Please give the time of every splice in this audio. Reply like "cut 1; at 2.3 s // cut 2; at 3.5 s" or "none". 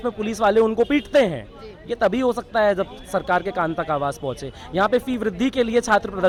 none